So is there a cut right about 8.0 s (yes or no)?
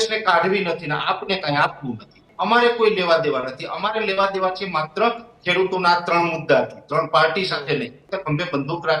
yes